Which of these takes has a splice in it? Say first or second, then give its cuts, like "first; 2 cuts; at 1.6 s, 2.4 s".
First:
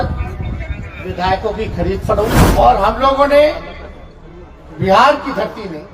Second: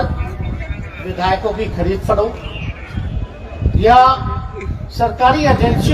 first; 1 cut; at 2.4 s